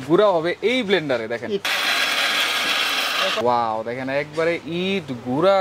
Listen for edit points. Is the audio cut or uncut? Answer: cut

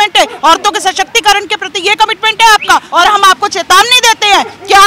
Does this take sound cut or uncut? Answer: cut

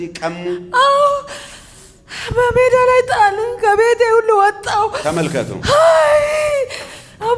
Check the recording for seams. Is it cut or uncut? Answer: uncut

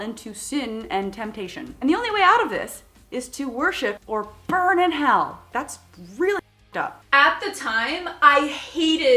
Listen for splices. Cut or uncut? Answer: cut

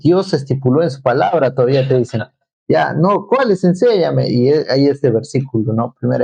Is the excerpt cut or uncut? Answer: uncut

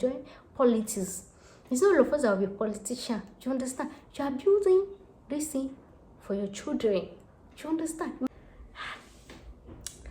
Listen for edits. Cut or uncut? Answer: cut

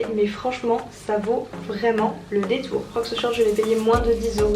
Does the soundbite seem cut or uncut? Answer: cut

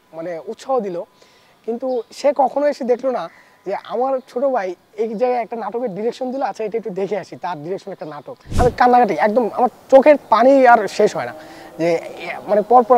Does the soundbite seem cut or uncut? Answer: cut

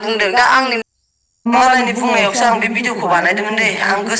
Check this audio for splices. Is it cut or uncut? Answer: uncut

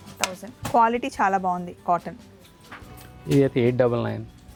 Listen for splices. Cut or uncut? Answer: uncut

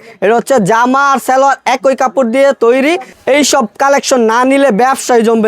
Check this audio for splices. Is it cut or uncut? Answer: cut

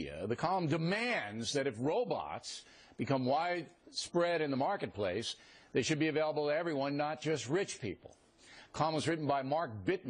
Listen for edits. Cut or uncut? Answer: uncut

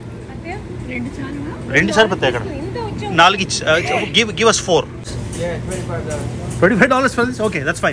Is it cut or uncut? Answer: cut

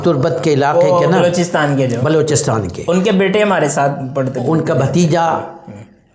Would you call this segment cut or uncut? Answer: uncut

